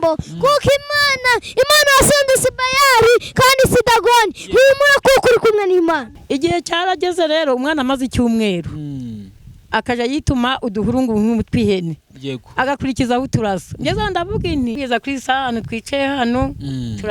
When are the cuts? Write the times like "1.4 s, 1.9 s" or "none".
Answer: 6.1 s, 14.8 s